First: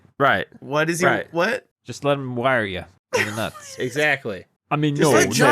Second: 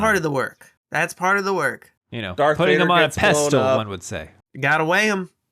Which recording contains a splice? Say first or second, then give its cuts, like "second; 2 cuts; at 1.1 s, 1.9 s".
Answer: first; 1 cut; at 4.5 s